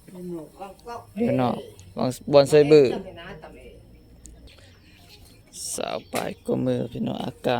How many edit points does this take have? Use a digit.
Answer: 1